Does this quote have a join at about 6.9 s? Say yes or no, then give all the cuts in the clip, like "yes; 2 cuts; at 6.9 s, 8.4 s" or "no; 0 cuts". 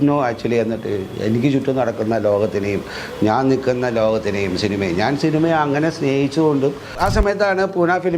yes; 1 cut; at 6.9 s